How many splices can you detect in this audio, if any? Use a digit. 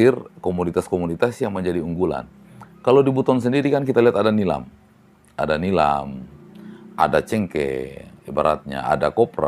0